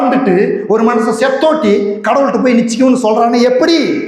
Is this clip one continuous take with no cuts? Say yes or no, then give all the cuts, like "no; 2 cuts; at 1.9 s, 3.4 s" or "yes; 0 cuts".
yes; 0 cuts